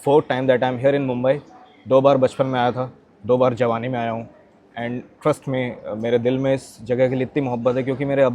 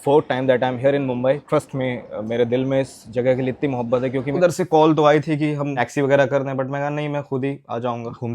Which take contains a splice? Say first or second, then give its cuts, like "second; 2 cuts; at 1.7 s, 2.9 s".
second; 2 cuts; at 1.4 s, 4.3 s